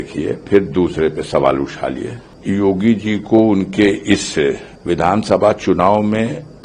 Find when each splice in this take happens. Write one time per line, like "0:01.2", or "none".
0:02.3
0:04.7